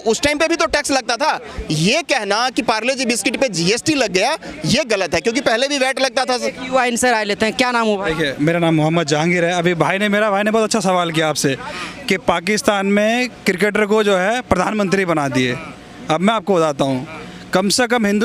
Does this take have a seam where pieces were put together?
no; 0 cuts

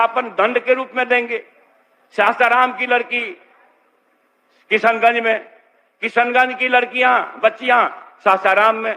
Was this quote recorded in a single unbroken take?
yes; 0 cuts

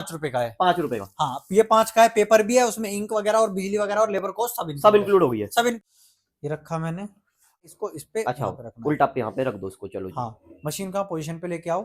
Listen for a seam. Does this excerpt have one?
yes; 2 cuts; at 5.8 s, 7.6 s

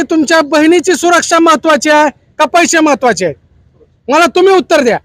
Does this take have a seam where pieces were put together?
no; 0 cuts

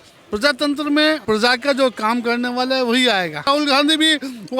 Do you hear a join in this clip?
yes; 2 cuts; at 1.2 s, 3.5 s

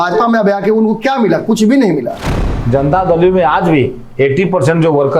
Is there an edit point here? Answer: yes; 1 cut; at 2.5 s

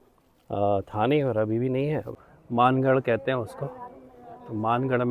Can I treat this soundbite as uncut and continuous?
no; 1 cut; at 2.2 s

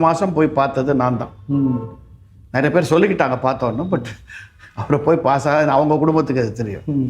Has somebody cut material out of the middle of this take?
no; 0 cuts

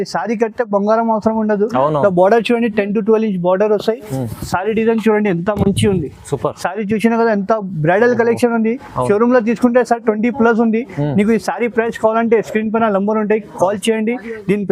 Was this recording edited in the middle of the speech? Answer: no; 0 cuts

